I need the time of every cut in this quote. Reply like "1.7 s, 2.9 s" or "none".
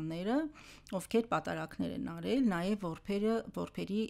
none